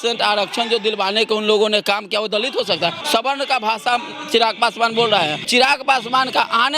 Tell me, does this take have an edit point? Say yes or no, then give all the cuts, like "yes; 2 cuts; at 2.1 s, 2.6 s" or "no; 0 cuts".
yes; 2 cuts; at 3.0 s, 5.5 s